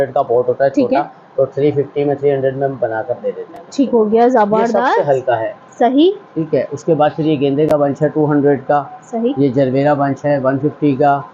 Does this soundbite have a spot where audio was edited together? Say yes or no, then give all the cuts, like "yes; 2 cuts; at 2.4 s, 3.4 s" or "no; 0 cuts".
no; 0 cuts